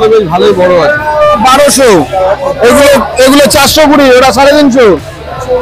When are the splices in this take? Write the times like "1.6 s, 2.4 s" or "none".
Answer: 1.4 s